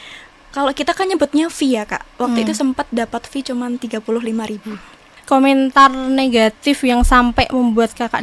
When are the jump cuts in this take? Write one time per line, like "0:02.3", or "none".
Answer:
0:05.1